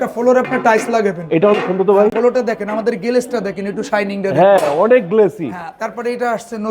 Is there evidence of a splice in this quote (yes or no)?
no